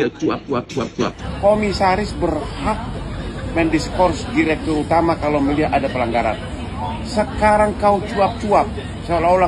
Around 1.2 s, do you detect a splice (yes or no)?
yes